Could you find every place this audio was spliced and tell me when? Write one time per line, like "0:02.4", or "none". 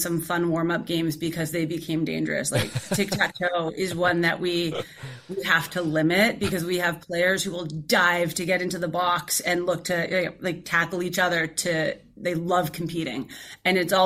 none